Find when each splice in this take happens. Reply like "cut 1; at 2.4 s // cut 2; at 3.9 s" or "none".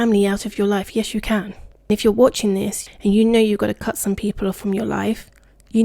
cut 1; at 1.9 s // cut 2; at 2.9 s